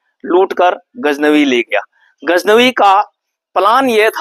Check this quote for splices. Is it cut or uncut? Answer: uncut